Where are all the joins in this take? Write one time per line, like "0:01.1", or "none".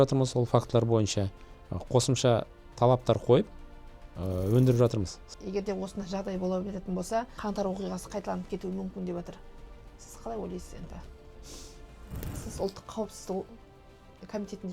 0:05.2
0:07.4
0:12.5